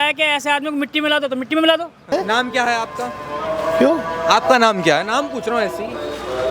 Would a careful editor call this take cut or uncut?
cut